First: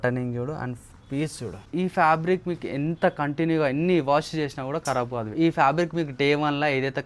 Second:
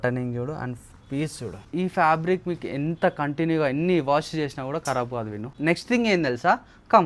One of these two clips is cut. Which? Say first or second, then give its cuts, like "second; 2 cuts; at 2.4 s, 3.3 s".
first; 1 cut; at 5.3 s